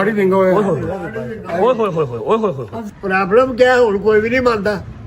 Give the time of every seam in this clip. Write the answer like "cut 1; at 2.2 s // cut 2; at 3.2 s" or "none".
cut 1; at 2.7 s